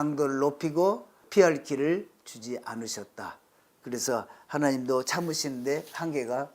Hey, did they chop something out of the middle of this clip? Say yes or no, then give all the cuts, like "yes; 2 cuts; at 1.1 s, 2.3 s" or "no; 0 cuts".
yes; 1 cut; at 1.1 s